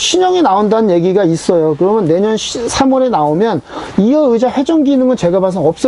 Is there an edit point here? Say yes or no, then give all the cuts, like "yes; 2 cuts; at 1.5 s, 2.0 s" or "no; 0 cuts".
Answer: no; 0 cuts